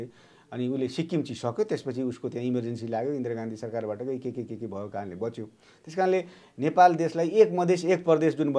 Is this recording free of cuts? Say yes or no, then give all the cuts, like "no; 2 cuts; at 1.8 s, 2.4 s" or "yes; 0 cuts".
yes; 0 cuts